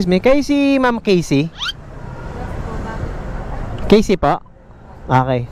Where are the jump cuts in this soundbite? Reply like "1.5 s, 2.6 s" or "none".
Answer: none